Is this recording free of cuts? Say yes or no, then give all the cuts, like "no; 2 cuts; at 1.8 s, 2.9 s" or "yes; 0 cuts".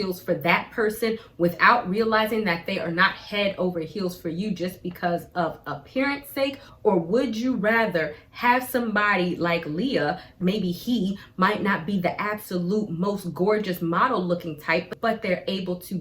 no; 3 cuts; at 6.7 s, 10.4 s, 14.9 s